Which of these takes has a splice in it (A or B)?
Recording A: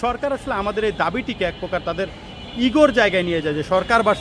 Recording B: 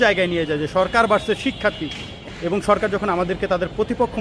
B